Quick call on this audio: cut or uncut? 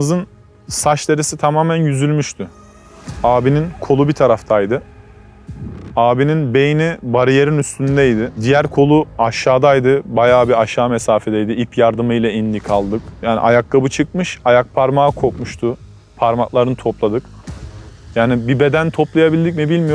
cut